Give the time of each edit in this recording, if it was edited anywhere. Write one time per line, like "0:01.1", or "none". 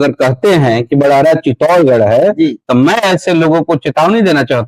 none